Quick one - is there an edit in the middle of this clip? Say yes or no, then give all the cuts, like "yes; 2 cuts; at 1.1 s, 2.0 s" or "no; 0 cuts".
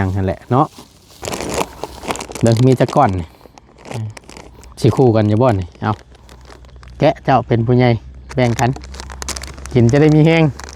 yes; 1 cut; at 1.2 s